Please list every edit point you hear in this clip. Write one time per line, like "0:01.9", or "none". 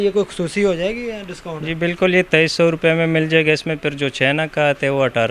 none